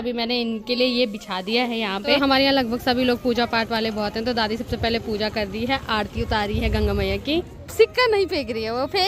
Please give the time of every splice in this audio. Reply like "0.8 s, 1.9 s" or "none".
2.2 s, 7.6 s